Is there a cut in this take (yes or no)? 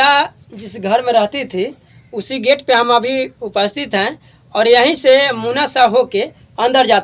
no